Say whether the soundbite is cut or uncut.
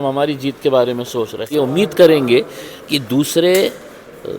cut